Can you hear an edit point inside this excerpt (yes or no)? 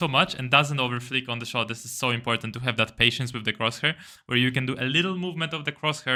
no